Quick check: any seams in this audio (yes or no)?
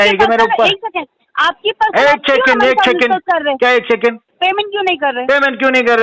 yes